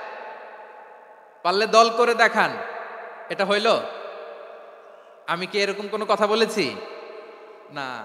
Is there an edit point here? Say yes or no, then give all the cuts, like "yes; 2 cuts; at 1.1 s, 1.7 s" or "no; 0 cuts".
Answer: no; 0 cuts